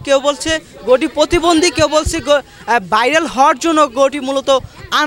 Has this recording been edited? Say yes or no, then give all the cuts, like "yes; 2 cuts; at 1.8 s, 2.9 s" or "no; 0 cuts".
no; 0 cuts